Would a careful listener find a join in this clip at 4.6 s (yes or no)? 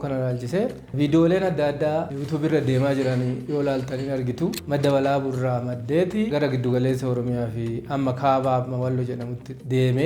yes